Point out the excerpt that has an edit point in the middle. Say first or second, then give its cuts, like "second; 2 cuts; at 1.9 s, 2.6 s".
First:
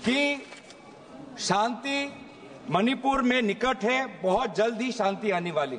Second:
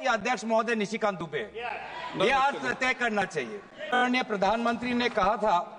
second; 1 cut; at 4.2 s